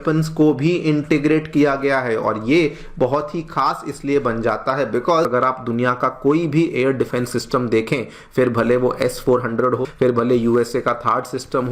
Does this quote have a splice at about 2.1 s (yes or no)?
no